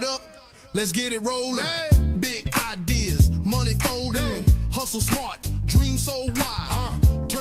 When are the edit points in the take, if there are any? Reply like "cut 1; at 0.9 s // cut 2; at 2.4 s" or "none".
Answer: none